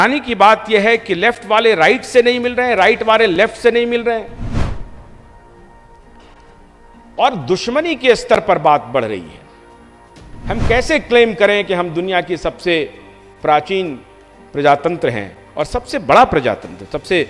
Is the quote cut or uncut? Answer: uncut